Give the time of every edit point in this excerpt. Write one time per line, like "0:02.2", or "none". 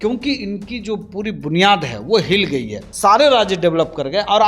0:02.8

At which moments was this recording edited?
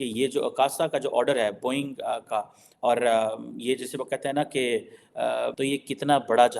0:05.5

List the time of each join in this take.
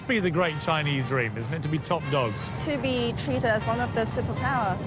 0:02.5

